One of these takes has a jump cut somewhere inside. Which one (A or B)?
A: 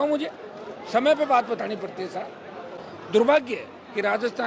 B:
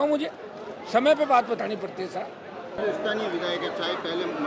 A